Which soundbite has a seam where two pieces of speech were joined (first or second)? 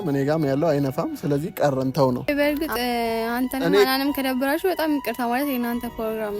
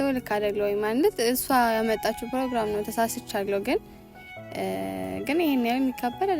first